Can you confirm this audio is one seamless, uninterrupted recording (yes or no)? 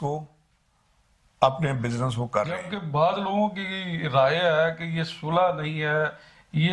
no